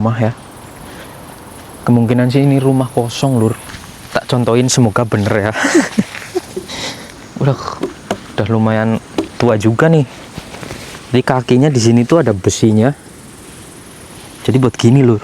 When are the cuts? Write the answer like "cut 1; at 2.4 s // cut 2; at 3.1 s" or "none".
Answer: cut 1; at 3.6 s